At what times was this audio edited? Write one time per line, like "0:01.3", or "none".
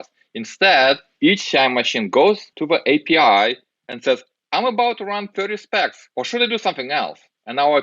0:01.1
0:02.5
0:06.0